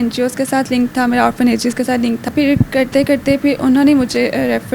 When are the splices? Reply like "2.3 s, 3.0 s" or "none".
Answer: 2.3 s